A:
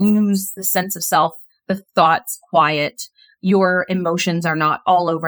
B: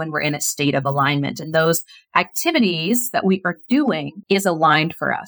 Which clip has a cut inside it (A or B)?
B